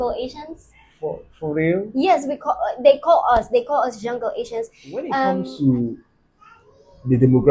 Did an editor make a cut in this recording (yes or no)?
yes